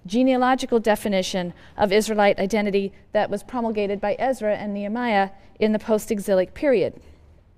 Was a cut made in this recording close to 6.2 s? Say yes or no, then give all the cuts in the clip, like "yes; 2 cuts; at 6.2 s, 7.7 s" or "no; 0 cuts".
yes; 1 cut; at 6.2 s